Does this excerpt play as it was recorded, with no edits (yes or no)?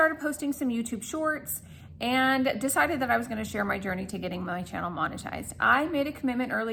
yes